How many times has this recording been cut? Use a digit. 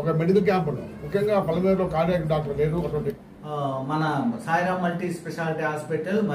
1